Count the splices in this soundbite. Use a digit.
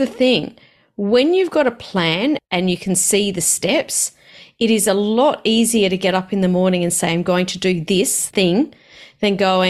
2